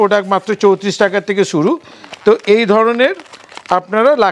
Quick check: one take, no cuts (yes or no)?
yes